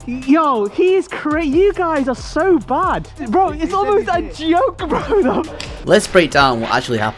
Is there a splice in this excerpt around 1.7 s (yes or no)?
no